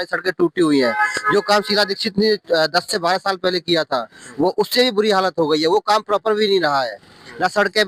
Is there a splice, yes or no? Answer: no